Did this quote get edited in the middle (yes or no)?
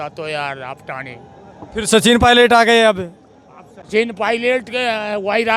no